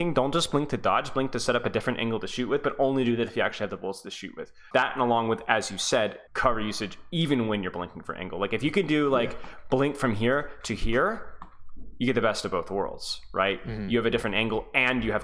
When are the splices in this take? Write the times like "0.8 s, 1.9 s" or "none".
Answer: 4.7 s, 6.2 s